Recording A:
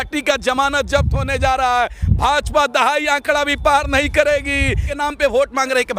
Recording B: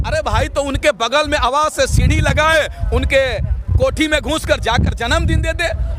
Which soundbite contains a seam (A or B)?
A